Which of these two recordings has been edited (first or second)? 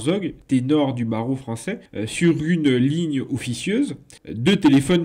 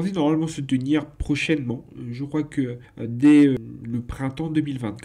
second